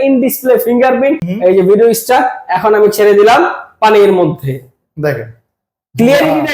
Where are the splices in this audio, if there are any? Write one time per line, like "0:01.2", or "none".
0:01.3